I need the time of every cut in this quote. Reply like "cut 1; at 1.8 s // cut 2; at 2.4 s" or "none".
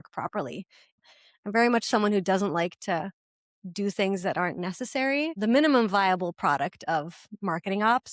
cut 1; at 1.0 s // cut 2; at 5.4 s